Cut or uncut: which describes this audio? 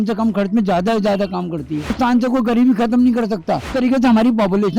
cut